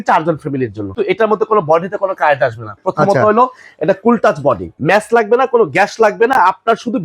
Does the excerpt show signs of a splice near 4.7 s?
yes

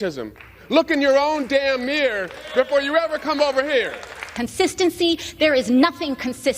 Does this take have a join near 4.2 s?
yes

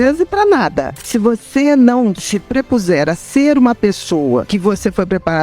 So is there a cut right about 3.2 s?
no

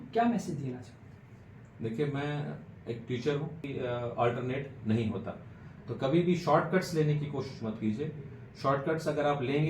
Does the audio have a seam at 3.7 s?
yes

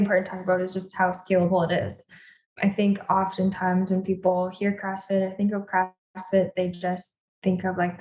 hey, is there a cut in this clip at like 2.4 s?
yes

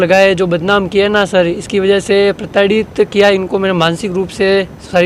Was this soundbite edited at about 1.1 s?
no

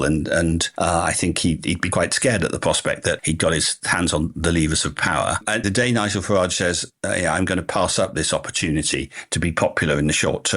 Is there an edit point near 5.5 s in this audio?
yes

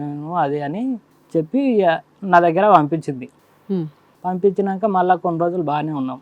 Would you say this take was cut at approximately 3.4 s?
no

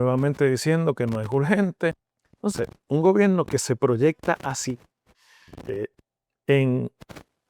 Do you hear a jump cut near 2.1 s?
yes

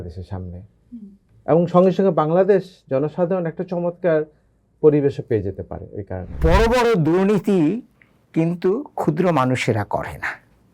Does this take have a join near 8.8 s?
no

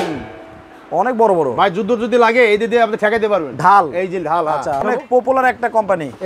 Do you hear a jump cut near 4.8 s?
yes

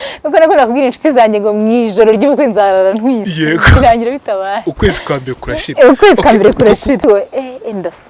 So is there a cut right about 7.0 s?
yes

